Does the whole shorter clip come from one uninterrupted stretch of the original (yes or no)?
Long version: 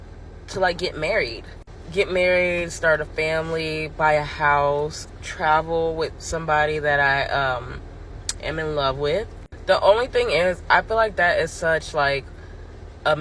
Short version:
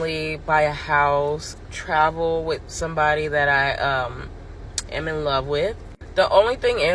yes